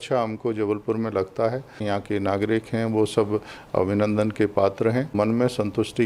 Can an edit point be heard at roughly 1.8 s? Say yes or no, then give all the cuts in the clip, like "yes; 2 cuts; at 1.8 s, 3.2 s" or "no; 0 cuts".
yes; 2 cuts; at 1.8 s, 5.1 s